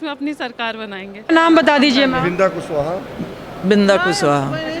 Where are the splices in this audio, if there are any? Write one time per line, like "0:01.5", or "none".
none

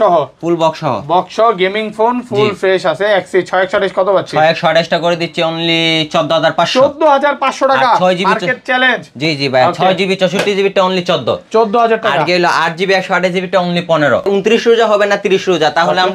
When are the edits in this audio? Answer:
0:14.3

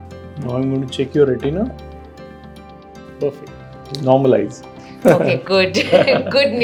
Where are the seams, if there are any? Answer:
none

